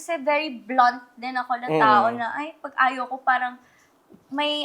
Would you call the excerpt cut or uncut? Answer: uncut